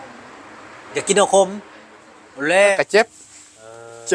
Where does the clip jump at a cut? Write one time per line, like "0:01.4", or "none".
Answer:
0:02.8